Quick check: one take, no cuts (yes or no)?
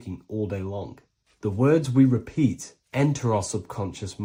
yes